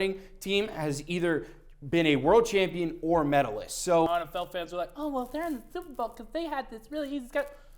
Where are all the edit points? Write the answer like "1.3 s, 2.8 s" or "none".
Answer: 4.1 s